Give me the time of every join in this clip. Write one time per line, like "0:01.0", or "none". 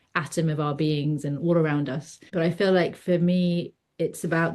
0:02.2